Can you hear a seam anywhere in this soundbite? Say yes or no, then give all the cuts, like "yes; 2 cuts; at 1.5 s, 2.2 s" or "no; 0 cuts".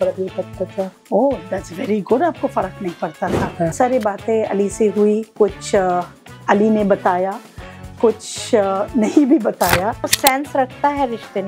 yes; 2 cuts; at 3.7 s, 10.1 s